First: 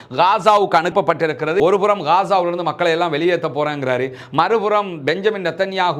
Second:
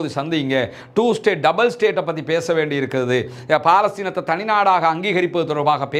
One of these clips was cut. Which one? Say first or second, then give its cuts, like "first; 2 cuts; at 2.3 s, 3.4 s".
first; 1 cut; at 1.6 s